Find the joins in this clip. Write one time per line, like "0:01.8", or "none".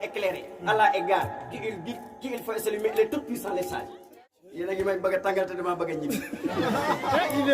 0:04.0